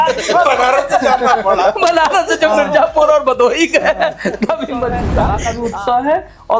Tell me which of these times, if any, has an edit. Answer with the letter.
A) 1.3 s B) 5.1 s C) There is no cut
B